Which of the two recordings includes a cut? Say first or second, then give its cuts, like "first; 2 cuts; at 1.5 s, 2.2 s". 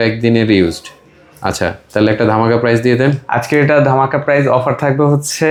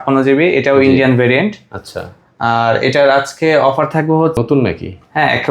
second; 1 cut; at 4.4 s